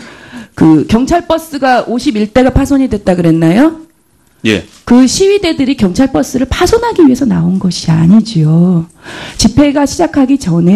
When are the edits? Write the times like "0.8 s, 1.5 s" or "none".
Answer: none